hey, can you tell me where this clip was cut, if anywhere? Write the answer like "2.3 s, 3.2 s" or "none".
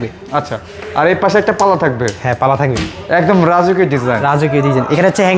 none